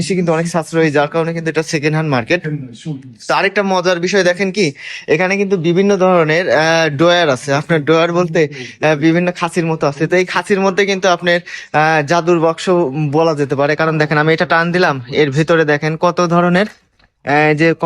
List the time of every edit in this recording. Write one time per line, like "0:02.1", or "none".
none